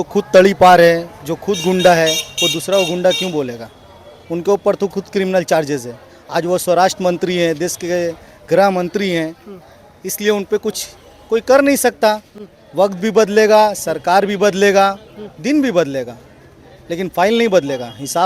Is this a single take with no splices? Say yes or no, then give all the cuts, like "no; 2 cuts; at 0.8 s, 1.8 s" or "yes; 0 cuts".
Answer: yes; 0 cuts